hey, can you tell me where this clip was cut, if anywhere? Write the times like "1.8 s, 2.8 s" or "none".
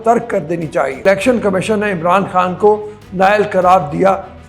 1.0 s